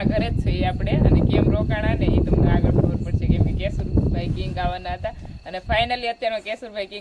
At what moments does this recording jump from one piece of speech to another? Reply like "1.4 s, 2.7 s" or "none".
none